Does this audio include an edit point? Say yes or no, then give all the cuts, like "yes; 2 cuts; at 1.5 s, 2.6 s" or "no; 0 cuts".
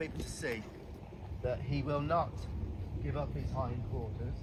no; 0 cuts